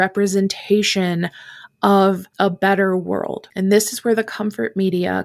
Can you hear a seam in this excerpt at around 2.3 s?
yes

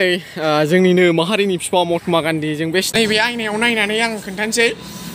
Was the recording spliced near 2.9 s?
yes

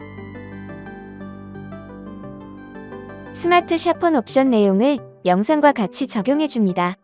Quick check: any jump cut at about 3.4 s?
yes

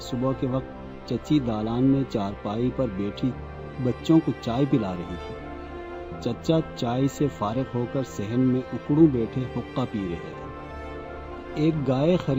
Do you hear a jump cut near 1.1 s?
no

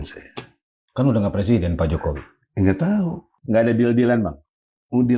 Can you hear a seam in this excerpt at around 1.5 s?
no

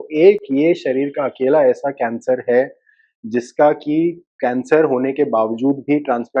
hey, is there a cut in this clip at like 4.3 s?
no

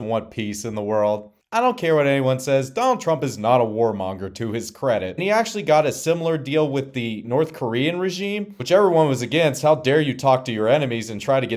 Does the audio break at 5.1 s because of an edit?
yes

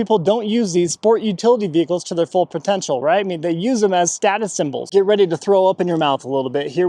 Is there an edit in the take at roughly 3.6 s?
no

